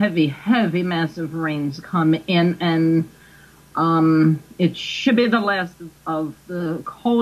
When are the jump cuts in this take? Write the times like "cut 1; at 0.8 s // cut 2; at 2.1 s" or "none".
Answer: none